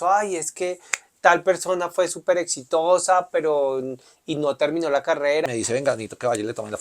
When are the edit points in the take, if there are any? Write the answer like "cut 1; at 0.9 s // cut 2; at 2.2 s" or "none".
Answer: cut 1; at 5.4 s